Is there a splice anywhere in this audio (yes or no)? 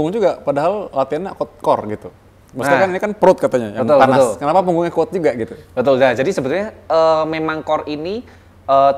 no